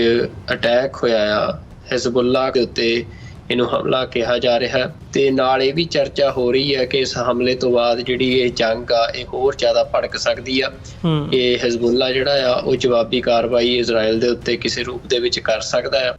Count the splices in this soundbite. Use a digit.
2